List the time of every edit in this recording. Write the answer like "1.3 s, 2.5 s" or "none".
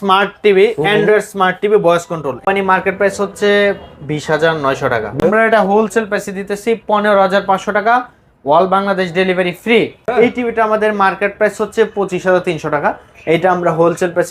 2.4 s, 5.2 s, 10.1 s